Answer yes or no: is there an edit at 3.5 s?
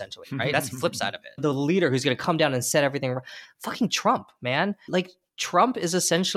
no